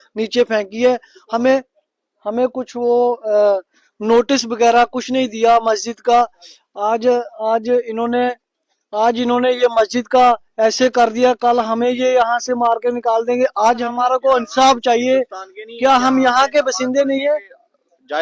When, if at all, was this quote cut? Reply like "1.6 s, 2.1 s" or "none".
13.9 s